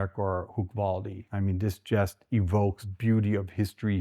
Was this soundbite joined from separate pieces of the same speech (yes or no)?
yes